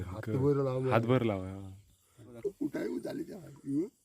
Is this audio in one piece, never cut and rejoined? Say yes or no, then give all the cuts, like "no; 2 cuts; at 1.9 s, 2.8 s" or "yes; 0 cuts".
no; 1 cut; at 2.3 s